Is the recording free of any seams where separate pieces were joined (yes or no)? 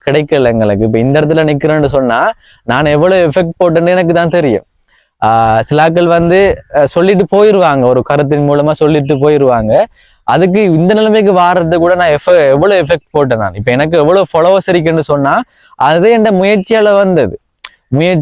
yes